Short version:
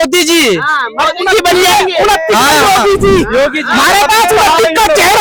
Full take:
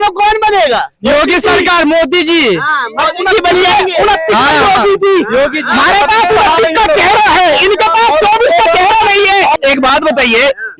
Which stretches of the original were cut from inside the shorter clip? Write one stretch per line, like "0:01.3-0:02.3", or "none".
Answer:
none

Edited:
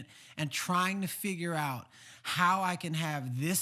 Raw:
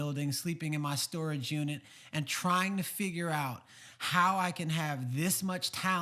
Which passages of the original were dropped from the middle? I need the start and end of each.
none

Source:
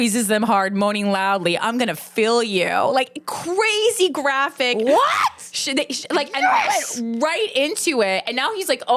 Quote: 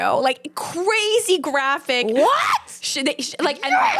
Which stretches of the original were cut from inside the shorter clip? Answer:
none

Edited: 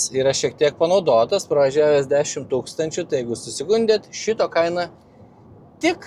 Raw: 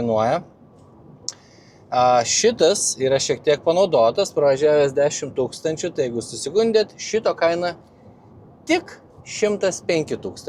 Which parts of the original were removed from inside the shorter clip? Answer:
none

